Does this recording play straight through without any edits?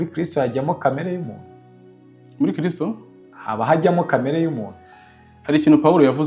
yes; 0 cuts

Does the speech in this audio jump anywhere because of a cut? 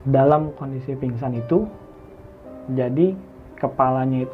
no; 0 cuts

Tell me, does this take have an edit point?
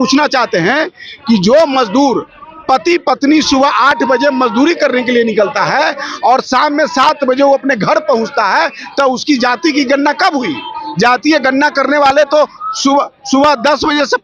no; 0 cuts

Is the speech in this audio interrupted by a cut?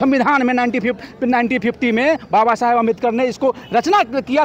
no; 0 cuts

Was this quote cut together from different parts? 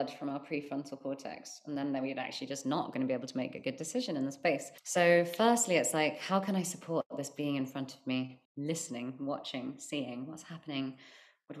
yes; 2 cuts; at 4.8 s, 8.4 s

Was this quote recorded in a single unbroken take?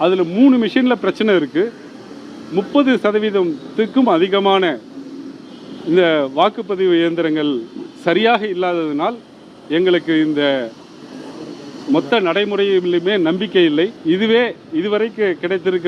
no; 1 cut; at 14.0 s

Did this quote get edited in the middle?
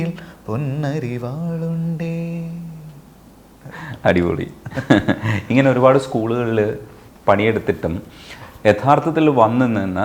no; 0 cuts

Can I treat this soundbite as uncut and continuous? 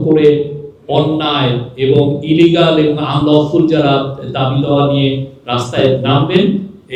yes; 0 cuts

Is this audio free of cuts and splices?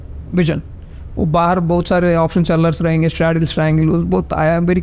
yes; 0 cuts

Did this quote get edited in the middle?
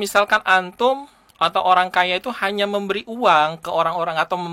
no; 0 cuts

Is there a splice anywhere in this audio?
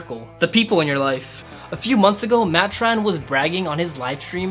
yes; 1 cut; at 1.4 s

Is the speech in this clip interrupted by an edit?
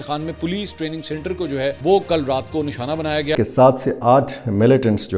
yes; 2 cuts; at 1.8 s, 3.3 s

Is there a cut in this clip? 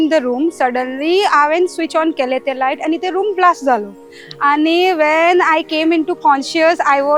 no; 0 cuts

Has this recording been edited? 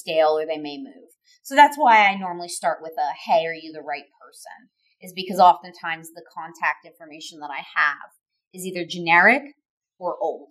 no; 0 cuts

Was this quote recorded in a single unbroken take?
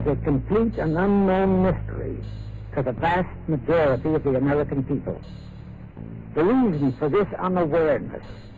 yes; 0 cuts

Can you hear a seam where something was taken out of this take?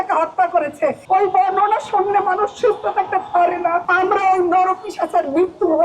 yes; 2 cuts; at 1.0 s, 3.9 s

